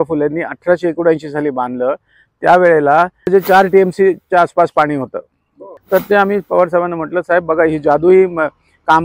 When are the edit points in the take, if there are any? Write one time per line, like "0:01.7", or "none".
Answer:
0:03.3
0:05.7